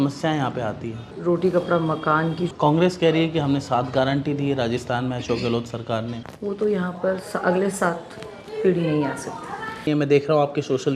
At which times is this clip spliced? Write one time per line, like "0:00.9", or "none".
0:01.1
0:02.5
0:06.3
0:09.9